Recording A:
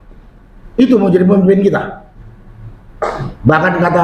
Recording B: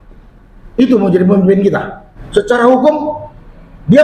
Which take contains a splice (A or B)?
B